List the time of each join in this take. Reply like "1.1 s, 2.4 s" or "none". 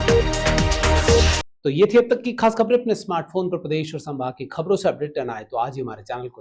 none

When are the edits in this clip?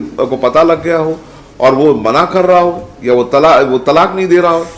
none

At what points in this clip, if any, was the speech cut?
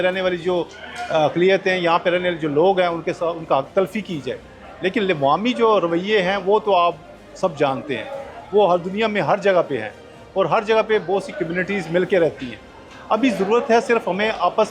none

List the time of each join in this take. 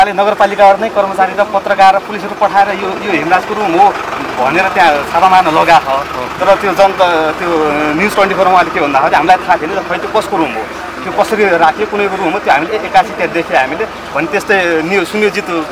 none

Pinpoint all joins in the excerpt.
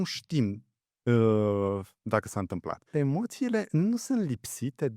2.9 s

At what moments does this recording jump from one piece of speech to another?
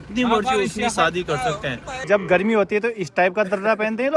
2.0 s

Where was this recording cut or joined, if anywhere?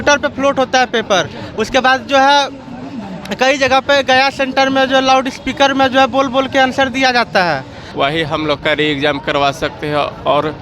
7.8 s

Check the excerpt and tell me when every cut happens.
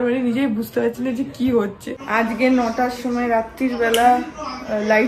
2.0 s

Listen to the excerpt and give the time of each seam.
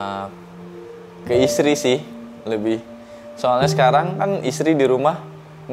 none

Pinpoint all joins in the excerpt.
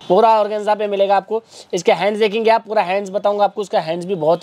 none

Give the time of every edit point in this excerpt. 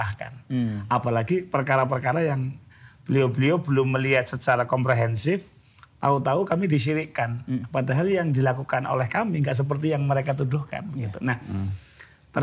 none

